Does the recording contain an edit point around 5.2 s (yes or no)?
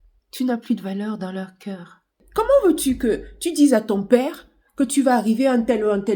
no